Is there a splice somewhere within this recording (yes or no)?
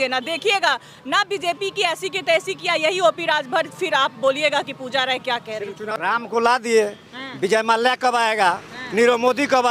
yes